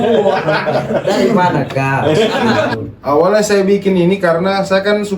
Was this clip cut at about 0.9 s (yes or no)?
no